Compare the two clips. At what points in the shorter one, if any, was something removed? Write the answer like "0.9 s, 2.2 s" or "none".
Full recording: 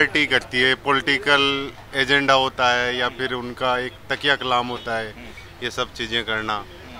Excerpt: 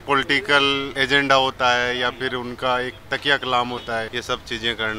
0.9 s, 4.1 s